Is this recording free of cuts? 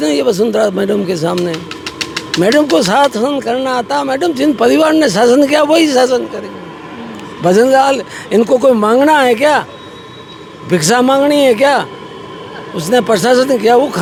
yes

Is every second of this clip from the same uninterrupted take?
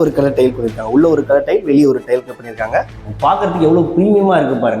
no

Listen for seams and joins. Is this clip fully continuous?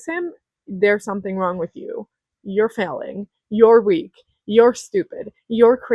yes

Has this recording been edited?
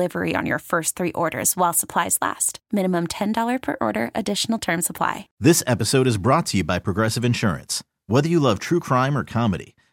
yes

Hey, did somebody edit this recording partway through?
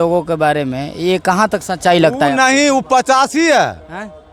no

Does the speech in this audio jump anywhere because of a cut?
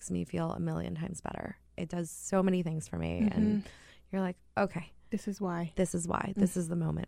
yes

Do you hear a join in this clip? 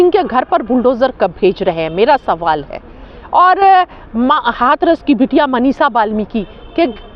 no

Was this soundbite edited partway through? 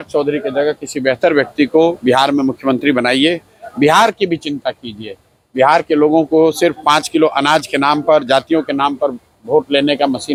no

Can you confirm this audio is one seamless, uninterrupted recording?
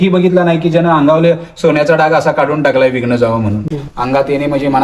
no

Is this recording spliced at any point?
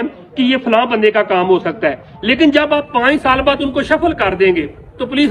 no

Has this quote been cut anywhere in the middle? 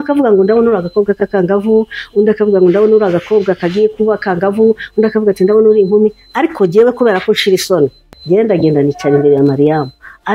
yes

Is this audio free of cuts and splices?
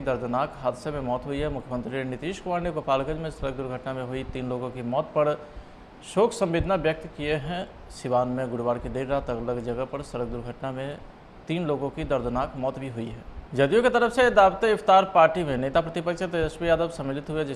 no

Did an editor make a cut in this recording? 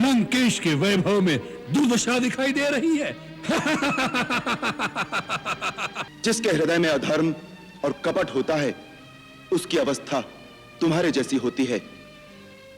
yes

